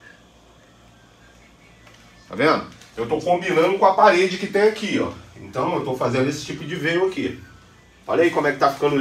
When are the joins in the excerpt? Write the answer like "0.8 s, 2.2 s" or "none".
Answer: none